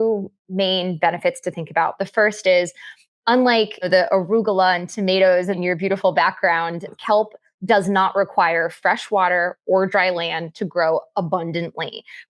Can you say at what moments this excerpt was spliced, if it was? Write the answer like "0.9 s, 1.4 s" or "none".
3.8 s, 5.6 s, 6.9 s